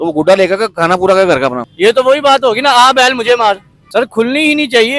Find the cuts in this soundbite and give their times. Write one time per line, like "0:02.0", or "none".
0:01.6
0:03.7

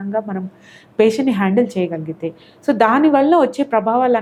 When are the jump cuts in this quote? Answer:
none

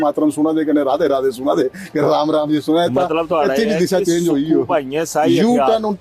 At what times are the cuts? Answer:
none

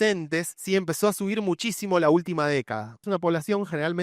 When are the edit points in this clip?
0:03.0

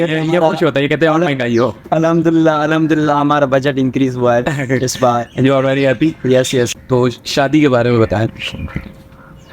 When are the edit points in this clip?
0:06.7

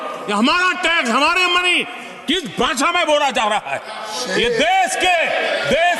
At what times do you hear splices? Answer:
none

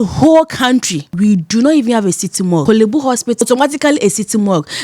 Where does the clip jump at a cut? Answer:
0:01.1
0:02.6
0:03.4

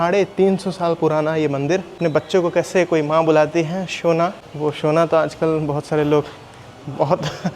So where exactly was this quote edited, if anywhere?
0:01.9
0:04.5

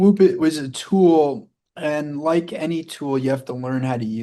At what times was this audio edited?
none

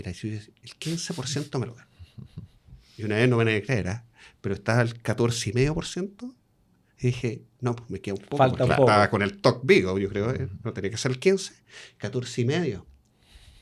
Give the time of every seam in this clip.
none

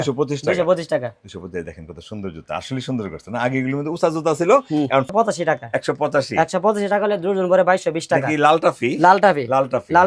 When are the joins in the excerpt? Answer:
0:05.1

